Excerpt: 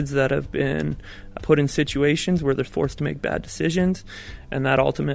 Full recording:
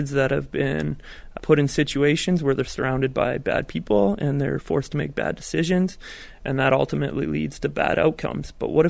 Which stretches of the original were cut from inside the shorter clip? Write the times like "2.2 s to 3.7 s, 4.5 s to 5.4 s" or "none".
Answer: 2.7 s to 4.6 s